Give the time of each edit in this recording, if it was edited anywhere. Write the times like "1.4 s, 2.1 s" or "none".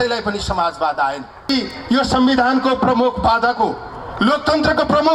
1.5 s